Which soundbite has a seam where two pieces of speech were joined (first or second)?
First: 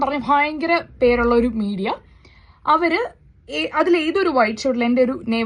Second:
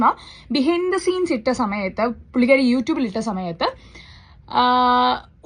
first